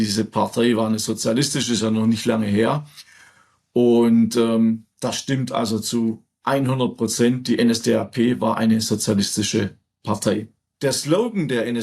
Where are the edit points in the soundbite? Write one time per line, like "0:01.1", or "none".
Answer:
0:10.6